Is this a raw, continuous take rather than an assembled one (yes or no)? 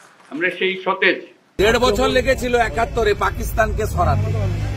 no